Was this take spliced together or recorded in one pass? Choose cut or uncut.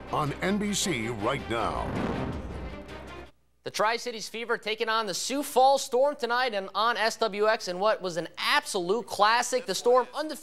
uncut